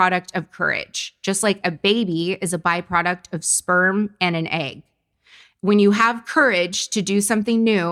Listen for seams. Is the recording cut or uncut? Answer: uncut